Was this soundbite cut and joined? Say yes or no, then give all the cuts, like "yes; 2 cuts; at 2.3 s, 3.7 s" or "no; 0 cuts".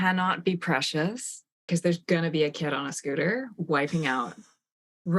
yes; 1 cut; at 1.7 s